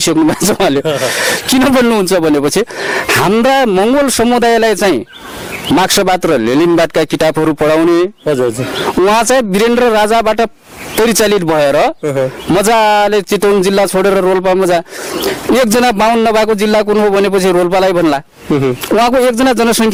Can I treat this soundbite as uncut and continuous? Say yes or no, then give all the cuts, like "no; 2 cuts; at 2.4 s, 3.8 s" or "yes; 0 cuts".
yes; 0 cuts